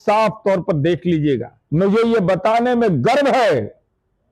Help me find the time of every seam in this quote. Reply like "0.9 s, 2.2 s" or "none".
1.6 s